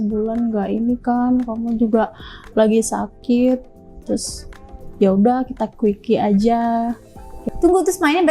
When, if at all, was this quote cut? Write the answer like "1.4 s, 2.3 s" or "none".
7.4 s